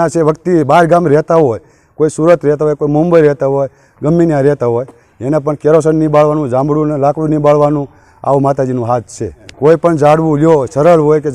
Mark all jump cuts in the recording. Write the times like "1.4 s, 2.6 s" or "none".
9.5 s